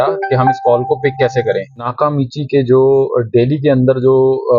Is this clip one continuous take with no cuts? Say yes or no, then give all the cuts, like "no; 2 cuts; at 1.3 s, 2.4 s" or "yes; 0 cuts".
no; 1 cut; at 1.9 s